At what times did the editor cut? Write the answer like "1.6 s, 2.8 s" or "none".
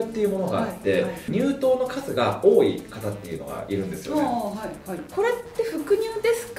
1.2 s, 5.1 s